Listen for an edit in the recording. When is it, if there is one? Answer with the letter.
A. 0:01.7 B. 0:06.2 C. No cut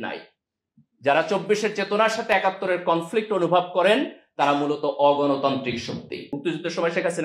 B